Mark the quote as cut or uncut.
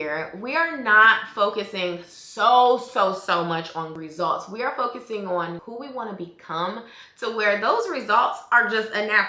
cut